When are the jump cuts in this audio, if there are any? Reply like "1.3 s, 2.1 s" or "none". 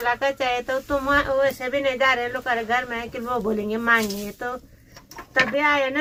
none